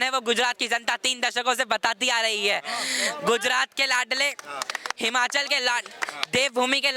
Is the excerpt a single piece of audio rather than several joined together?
yes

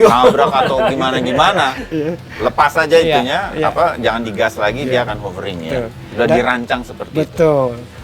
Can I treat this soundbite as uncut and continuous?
yes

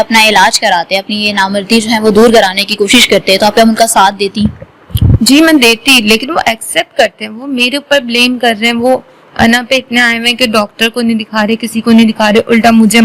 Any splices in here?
no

